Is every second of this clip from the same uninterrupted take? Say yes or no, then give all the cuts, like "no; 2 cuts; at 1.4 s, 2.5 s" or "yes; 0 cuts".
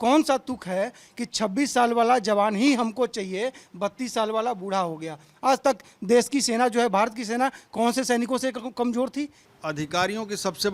no; 1 cut; at 9.4 s